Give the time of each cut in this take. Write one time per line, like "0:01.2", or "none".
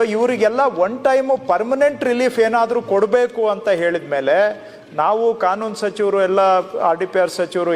none